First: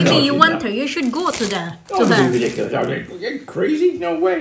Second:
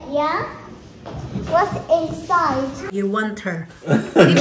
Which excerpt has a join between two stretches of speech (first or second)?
second